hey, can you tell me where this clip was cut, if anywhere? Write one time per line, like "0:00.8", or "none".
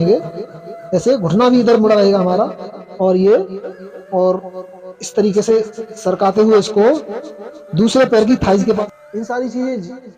0:08.8